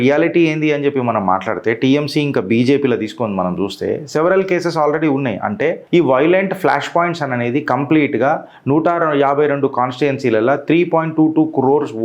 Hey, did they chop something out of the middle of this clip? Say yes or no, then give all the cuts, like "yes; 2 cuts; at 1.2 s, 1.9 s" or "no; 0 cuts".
yes; 1 cut; at 5.8 s